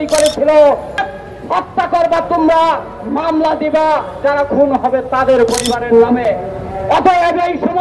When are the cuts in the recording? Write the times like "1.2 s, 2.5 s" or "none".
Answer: 0.9 s